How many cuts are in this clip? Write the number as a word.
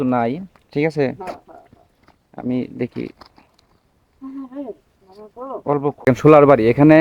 one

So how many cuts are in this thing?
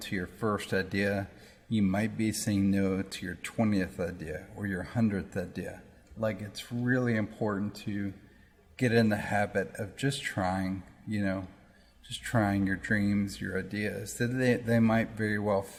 zero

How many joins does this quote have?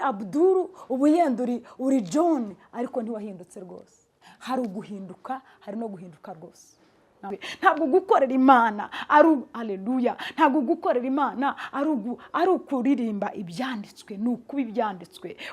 one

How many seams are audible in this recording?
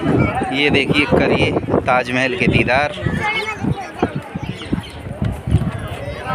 zero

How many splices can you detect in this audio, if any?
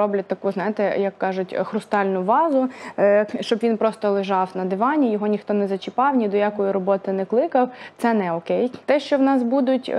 one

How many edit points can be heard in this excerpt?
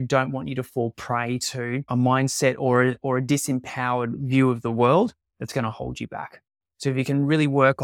one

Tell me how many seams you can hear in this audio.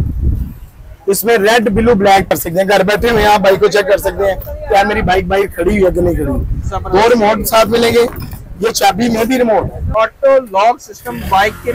two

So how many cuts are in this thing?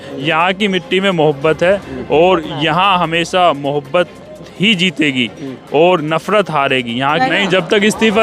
one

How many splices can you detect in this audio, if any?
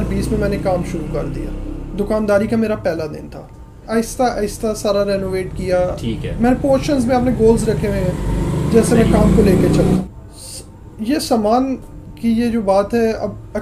two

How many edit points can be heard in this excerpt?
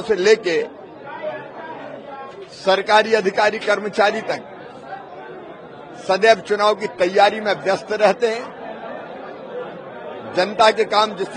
zero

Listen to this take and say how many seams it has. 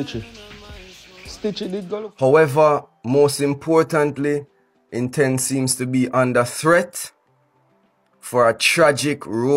one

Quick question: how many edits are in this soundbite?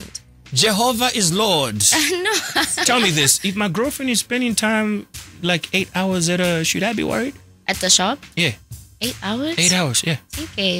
one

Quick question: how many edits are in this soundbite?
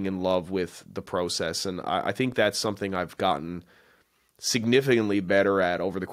zero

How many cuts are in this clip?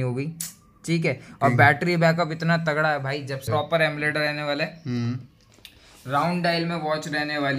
one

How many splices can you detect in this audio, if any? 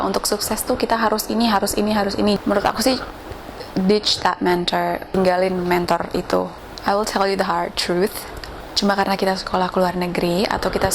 two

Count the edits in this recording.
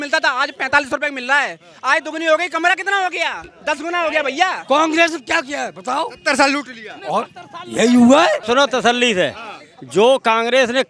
two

